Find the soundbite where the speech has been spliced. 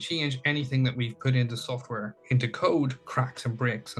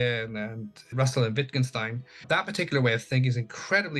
second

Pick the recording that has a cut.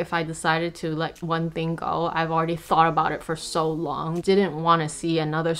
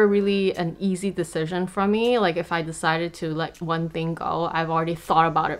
first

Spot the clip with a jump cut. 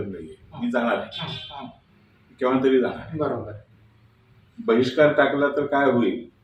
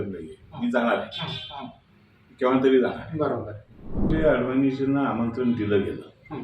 second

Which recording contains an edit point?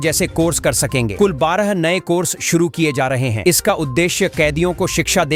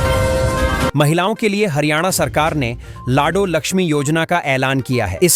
second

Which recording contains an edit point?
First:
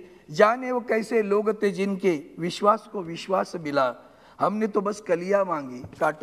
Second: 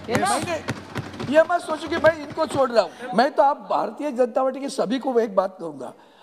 second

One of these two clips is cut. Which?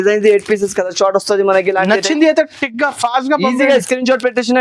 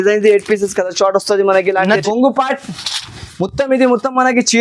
second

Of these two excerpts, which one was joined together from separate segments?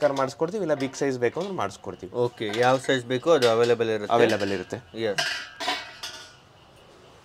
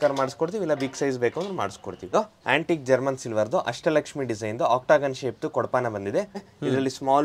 second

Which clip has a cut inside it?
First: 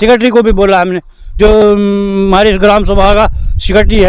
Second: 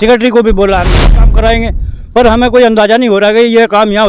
second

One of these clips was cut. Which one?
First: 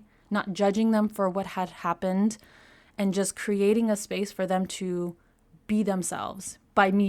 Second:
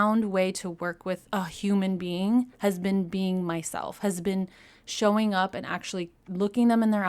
second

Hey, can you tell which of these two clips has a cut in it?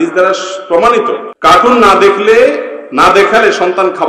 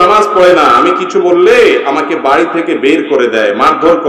first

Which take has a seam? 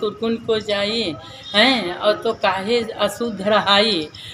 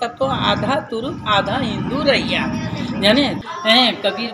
second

